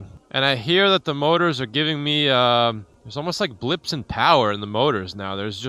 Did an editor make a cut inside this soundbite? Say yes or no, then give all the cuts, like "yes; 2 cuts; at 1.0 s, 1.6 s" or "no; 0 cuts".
no; 0 cuts